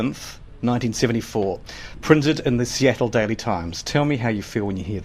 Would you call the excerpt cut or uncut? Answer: cut